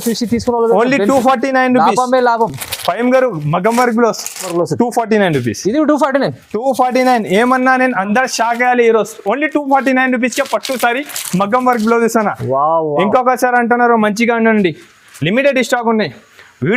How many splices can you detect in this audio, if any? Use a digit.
0